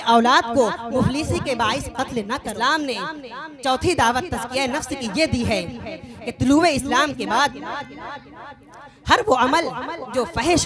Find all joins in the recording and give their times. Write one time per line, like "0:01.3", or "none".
0:02.4